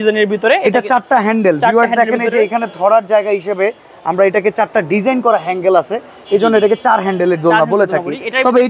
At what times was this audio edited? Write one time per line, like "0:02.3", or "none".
none